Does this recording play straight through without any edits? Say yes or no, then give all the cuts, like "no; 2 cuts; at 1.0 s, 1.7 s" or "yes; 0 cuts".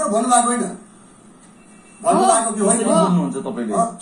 yes; 0 cuts